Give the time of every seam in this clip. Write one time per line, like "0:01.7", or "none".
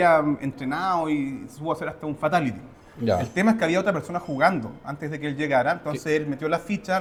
none